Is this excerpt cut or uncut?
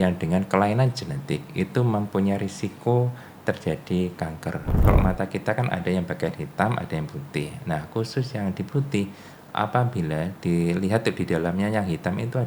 cut